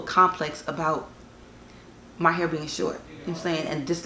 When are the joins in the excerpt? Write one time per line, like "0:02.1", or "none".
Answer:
none